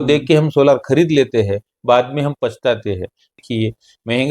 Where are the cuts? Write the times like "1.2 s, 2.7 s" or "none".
3.4 s